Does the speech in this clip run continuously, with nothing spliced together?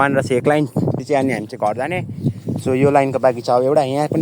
no; 1 cut; at 1.0 s

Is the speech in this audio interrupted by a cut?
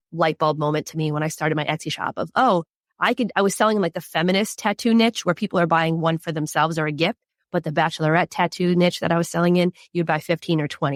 no; 0 cuts

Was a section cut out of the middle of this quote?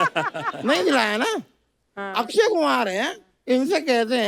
no; 0 cuts

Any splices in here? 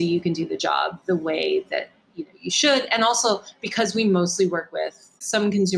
no; 0 cuts

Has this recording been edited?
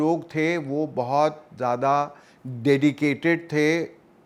no; 0 cuts

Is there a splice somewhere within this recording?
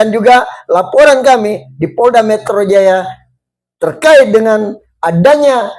no; 0 cuts

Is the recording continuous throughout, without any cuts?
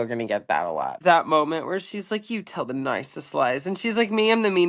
no; 1 cut; at 1.0 s

